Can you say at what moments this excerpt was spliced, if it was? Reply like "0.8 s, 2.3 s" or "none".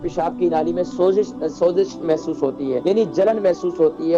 2.8 s